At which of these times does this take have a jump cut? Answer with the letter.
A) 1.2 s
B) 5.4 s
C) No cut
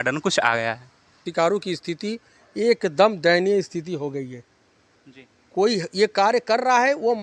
A